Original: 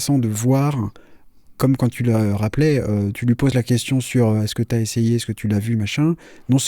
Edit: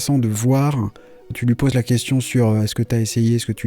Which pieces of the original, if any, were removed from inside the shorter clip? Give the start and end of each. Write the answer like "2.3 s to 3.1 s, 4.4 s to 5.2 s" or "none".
1.3 s to 3.1 s